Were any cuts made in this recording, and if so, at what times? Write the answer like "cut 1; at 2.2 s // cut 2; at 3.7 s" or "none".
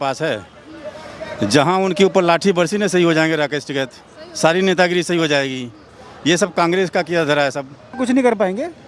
cut 1; at 8.0 s